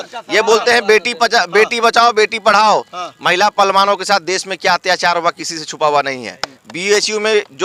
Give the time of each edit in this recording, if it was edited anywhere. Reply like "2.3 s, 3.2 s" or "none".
none